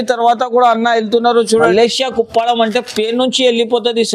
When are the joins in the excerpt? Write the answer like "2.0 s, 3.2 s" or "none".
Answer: 1.7 s